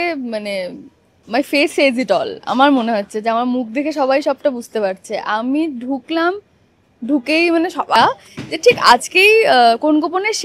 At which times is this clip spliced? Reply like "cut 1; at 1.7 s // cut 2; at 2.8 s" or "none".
cut 1; at 8.0 s